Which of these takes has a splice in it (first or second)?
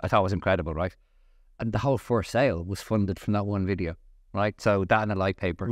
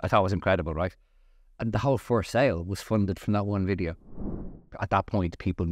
second